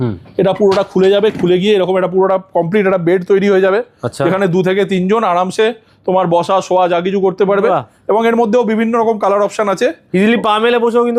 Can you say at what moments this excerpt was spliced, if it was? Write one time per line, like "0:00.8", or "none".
none